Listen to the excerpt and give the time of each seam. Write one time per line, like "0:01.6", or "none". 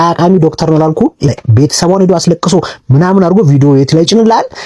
0:01.3